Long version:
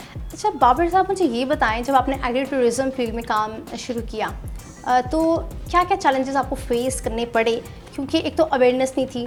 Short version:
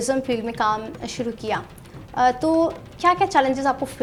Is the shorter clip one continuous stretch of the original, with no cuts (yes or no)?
yes